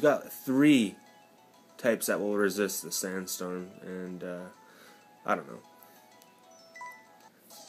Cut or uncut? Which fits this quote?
uncut